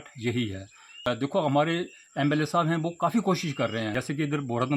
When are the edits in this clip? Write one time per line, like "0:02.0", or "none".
0:01.1
0:03.9